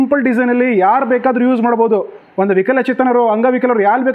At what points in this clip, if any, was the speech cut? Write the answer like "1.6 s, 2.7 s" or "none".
none